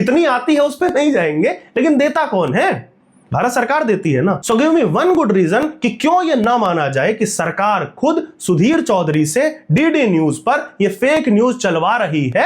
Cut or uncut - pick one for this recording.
uncut